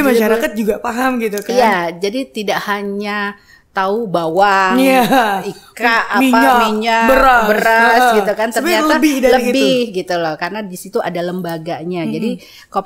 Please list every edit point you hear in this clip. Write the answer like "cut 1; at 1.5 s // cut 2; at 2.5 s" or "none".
none

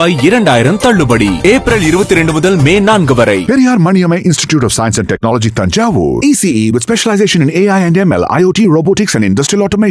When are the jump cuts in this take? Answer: none

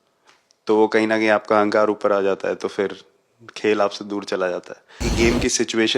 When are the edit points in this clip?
cut 1; at 5.1 s

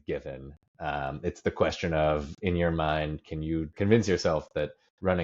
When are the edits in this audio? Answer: cut 1; at 3.7 s

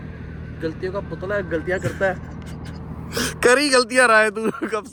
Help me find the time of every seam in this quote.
none

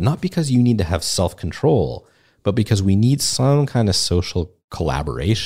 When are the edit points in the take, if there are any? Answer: none

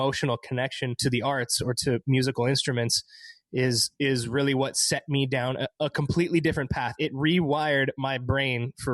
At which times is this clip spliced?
cut 1; at 1.0 s

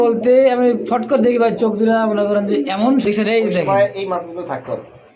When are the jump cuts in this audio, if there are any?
cut 1; at 3.0 s

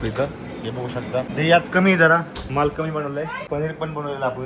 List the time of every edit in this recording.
cut 1; at 1.3 s // cut 2; at 3.4 s

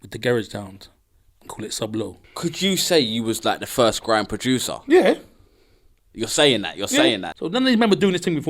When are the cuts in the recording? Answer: cut 1; at 2.2 s // cut 2; at 7.3 s

